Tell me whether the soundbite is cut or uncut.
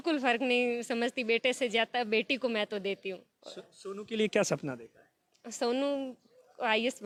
uncut